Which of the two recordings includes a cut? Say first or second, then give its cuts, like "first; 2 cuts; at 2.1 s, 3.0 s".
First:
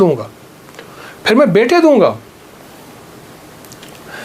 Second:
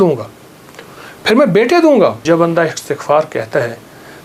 second; 1 cut; at 2.2 s